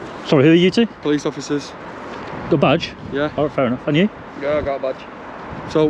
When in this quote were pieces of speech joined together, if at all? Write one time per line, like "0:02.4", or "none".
none